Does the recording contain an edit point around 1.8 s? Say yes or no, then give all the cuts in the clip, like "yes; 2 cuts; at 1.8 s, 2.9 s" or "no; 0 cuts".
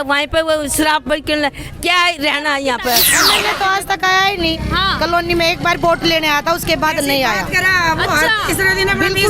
no; 1 cut; at 3.2 s